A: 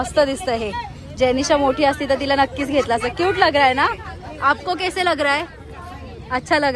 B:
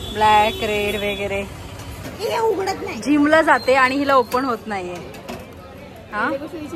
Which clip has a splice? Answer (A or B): B